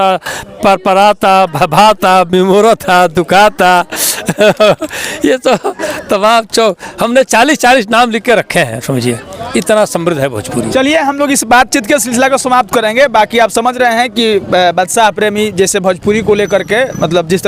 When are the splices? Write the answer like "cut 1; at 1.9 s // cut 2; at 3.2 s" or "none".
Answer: none